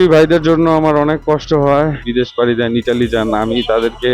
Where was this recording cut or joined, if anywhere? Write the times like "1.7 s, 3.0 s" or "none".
2.0 s